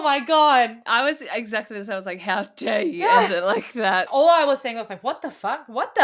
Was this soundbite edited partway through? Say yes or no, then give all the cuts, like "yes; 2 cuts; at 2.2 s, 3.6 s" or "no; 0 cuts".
yes; 1 cut; at 4.1 s